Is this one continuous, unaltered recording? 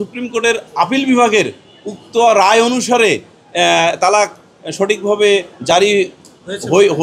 yes; 0 cuts

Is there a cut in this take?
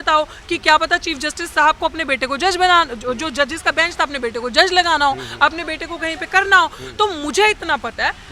no; 0 cuts

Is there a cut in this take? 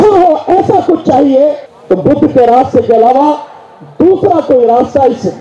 yes; 1 cut; at 1.7 s

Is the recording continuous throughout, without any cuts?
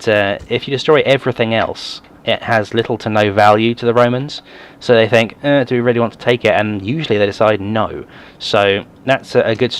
no; 1 cut; at 3.3 s

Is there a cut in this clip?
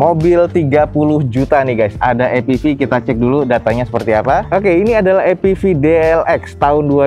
no; 0 cuts

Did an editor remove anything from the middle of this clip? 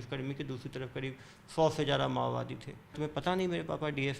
yes; 1 cut; at 3.0 s

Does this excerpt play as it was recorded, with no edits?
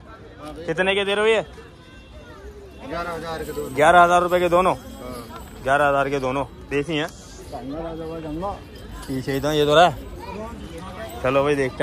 yes; 0 cuts

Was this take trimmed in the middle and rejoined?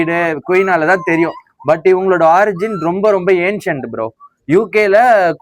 no; 0 cuts

